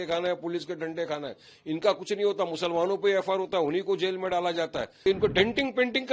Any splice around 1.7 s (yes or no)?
no